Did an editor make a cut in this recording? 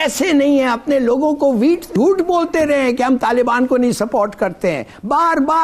no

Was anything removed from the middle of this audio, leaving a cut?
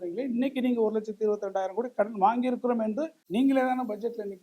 yes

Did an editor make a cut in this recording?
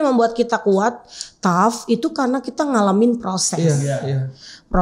no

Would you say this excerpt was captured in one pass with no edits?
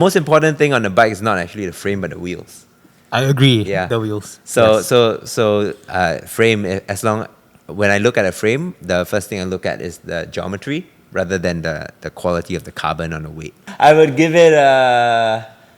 no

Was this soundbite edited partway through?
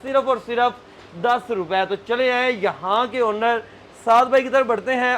no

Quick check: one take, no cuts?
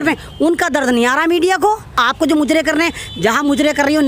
no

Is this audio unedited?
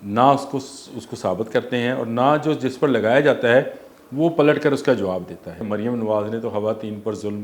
no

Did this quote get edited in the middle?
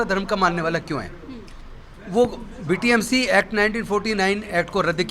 no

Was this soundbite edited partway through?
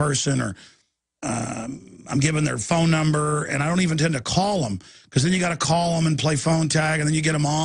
yes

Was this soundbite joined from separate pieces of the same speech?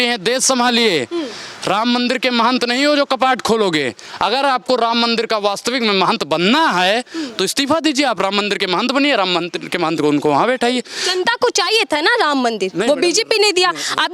no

